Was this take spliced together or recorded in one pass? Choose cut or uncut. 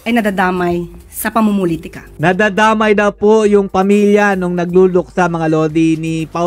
uncut